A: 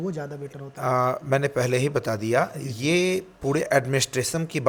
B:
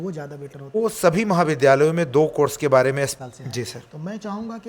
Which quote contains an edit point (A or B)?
B